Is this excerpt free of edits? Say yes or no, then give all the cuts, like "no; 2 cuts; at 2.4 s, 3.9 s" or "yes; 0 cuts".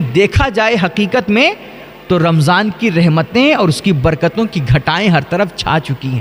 yes; 0 cuts